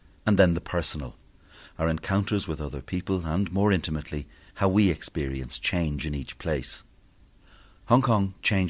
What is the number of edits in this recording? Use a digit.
1